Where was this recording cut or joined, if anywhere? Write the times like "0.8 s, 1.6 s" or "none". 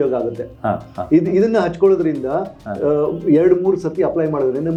none